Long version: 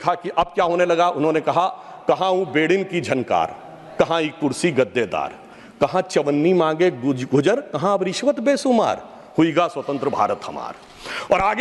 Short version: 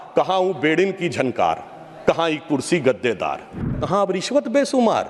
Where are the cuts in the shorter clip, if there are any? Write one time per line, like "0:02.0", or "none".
0:03.8